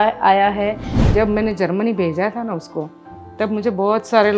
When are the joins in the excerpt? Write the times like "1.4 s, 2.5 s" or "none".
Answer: 1.0 s